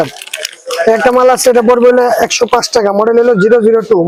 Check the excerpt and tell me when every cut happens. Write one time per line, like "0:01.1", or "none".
none